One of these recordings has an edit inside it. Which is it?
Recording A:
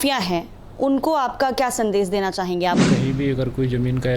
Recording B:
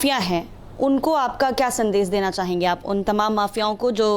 A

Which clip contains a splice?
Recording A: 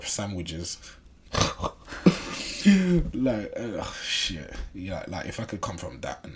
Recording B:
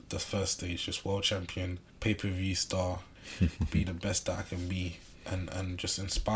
B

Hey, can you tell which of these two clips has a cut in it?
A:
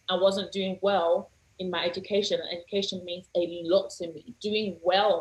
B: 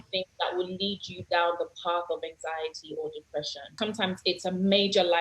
B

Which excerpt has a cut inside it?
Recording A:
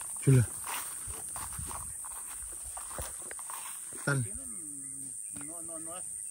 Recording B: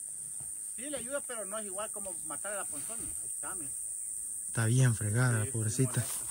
A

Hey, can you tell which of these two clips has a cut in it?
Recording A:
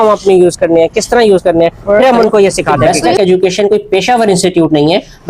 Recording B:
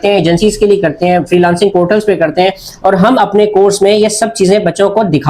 A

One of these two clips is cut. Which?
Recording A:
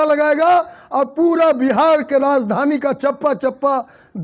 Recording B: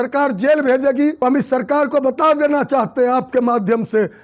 B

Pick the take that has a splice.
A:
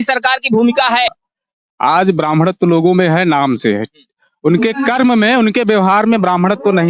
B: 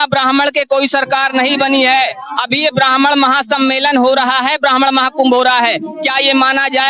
A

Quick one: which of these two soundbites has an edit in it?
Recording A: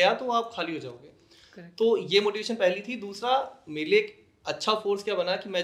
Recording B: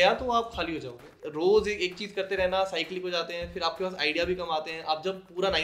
B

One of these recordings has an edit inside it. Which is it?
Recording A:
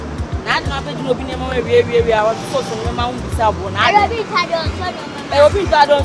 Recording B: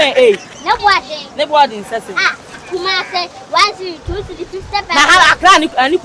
B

